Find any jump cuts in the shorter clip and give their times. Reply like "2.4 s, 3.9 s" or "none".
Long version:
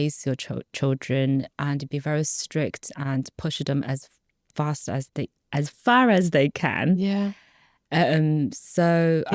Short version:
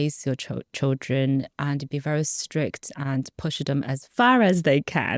4.1 s